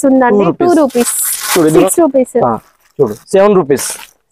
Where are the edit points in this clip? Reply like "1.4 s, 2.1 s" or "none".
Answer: 1.8 s